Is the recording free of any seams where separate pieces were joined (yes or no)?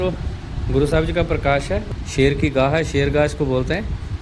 yes